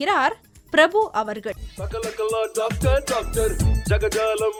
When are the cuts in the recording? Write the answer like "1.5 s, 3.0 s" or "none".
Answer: none